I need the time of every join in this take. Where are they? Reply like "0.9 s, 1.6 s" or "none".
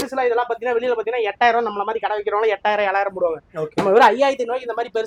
none